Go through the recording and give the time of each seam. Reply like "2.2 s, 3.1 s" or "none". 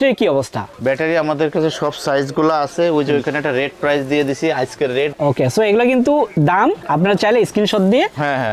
none